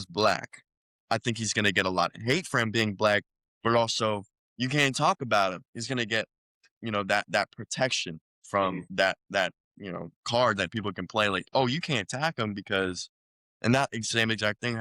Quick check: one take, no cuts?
no; 2 cuts; at 8.8 s, 10.2 s

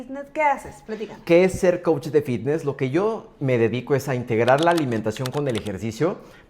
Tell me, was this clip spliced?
yes; 1 cut; at 1.2 s

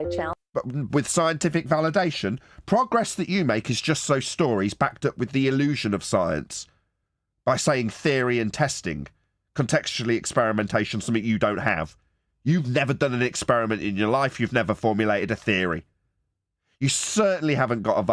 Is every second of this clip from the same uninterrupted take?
yes; 0 cuts

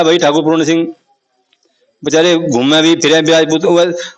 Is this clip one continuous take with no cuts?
yes; 0 cuts

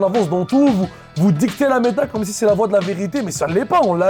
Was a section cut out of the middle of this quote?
no; 0 cuts

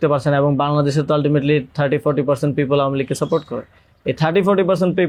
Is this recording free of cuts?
yes; 0 cuts

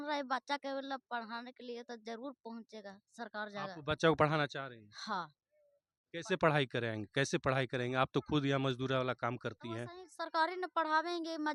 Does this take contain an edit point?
no; 0 cuts

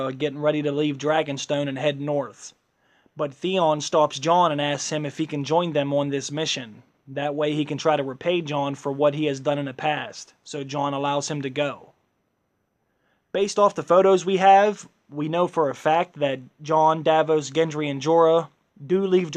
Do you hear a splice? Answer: no; 0 cuts

